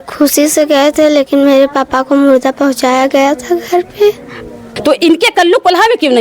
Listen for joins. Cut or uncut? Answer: cut